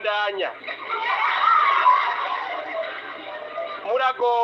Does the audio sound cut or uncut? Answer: uncut